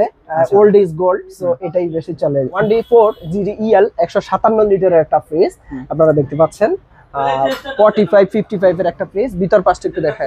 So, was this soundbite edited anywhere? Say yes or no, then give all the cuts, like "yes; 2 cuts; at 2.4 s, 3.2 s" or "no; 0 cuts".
yes; 1 cut; at 2.5 s